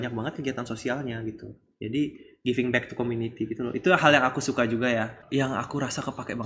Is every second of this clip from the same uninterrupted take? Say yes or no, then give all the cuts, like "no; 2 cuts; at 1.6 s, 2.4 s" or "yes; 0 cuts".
no; 1 cut; at 5.2 s